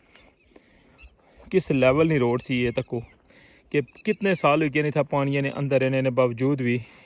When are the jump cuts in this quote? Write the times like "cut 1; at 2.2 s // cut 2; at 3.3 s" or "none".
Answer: none